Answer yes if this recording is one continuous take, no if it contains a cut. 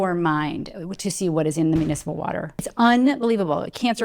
no